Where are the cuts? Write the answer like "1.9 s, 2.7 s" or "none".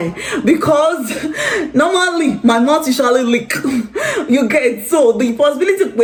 none